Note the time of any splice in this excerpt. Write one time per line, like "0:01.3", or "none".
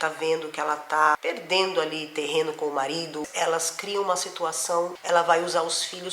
0:01.2
0:03.2
0:05.0